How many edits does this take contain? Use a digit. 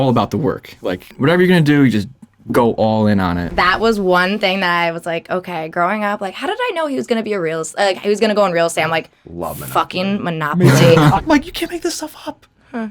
3